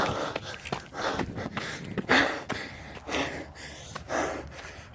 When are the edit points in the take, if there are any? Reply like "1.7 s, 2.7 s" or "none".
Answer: 1.0 s, 2.1 s, 2.9 s